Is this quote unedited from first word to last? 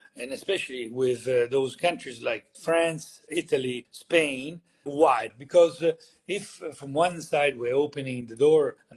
yes; 0 cuts

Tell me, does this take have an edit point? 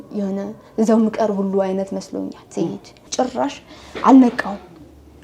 yes; 1 cut; at 3.0 s

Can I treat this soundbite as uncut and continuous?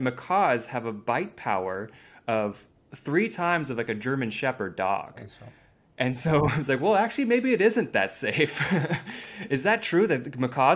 yes; 0 cuts

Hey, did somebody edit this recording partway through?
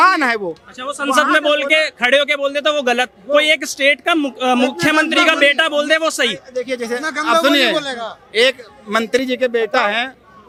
no; 0 cuts

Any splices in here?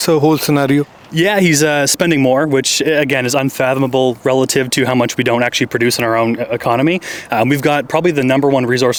no; 0 cuts

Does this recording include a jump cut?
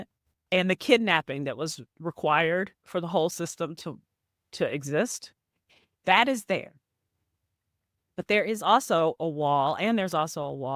no; 0 cuts

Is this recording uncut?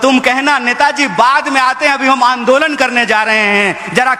yes; 0 cuts

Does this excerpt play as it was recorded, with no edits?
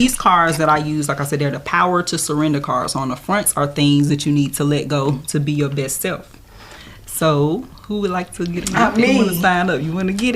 no; 1 cut; at 8.7 s

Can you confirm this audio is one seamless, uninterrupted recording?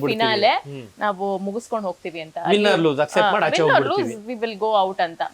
yes; 0 cuts

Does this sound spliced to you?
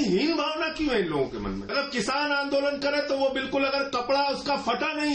yes; 1 cut; at 1.6 s

